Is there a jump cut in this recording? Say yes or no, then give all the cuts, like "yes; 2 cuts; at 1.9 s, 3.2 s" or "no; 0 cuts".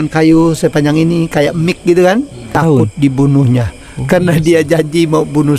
yes; 1 cut; at 2.4 s